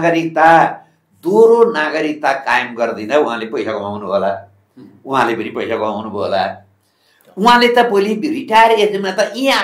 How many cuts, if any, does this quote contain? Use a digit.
0